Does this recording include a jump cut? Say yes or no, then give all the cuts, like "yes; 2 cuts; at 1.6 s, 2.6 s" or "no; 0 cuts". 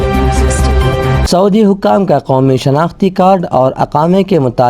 yes; 1 cut; at 1.2 s